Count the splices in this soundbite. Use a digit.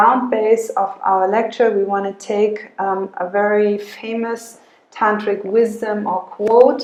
0